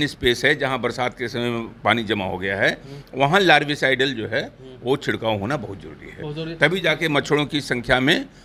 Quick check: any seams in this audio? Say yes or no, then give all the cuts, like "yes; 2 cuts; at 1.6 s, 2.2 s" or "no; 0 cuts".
no; 0 cuts